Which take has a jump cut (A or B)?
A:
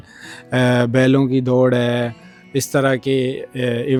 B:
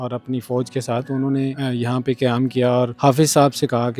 B